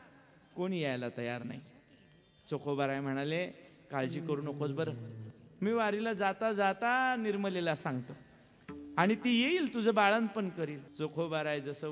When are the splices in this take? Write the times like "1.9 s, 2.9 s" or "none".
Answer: 10.8 s